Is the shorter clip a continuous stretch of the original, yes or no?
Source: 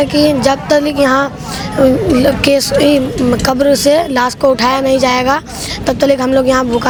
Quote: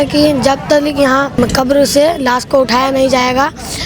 no